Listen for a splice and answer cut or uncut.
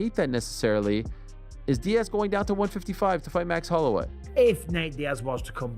cut